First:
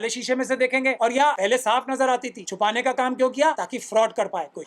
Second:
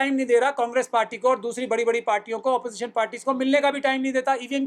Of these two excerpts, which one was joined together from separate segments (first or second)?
first